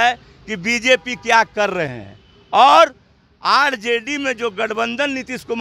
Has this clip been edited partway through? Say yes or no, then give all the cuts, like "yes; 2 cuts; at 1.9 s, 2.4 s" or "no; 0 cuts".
no; 0 cuts